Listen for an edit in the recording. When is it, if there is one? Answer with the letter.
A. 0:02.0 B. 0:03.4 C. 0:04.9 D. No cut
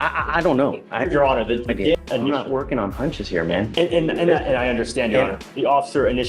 A